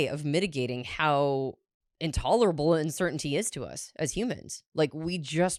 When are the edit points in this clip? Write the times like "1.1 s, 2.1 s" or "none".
none